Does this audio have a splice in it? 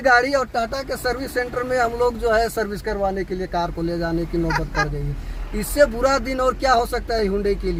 no; 0 cuts

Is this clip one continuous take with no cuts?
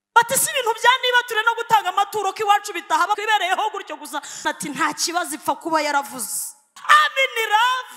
no; 3 cuts; at 3.2 s, 4.4 s, 6.7 s

